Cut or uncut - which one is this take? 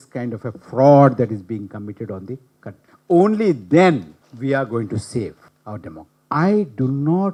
uncut